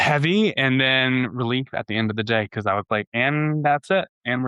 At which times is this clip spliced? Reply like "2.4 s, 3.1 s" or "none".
none